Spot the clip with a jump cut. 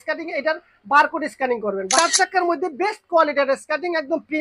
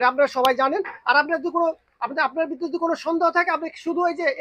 first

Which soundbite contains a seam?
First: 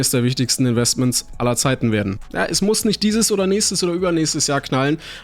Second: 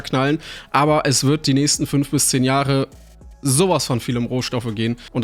first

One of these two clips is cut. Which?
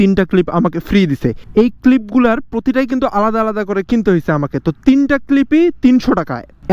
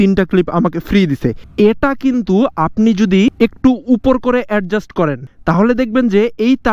second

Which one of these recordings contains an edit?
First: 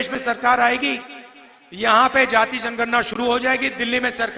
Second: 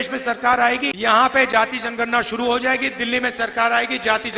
second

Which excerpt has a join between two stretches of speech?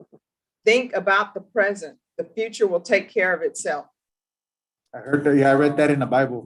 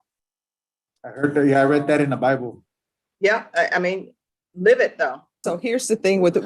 second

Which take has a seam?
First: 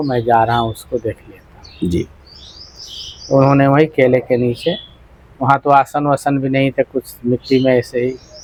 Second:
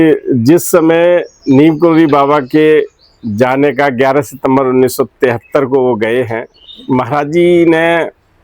second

